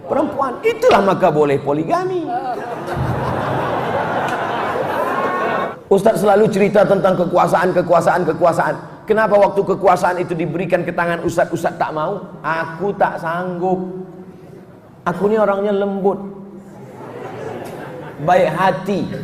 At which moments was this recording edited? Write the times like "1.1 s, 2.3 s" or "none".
5.7 s